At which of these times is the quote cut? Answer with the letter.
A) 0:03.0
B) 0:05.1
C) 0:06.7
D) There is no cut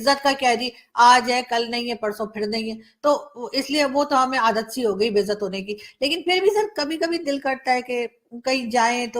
D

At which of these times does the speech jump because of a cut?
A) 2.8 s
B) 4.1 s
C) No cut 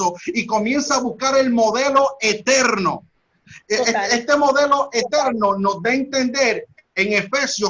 C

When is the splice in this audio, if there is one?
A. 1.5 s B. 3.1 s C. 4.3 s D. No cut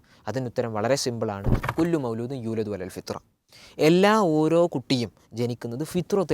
A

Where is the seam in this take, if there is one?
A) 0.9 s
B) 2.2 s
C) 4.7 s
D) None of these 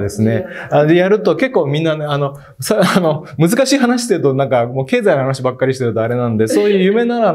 D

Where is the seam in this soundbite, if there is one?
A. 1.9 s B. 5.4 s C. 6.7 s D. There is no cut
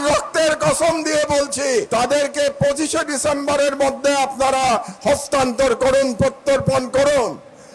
A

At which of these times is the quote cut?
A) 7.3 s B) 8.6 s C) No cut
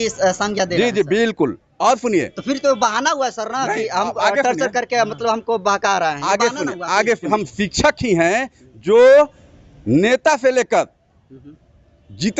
A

